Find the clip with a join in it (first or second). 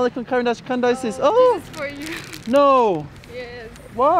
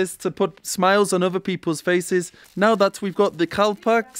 second